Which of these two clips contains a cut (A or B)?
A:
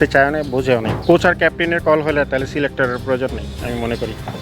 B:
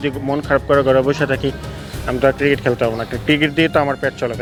A